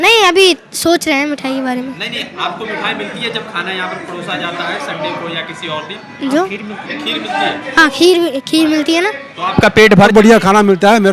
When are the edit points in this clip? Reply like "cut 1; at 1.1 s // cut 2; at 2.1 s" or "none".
cut 1; at 10.1 s